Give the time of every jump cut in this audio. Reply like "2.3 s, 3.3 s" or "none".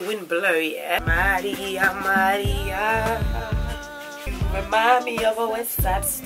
none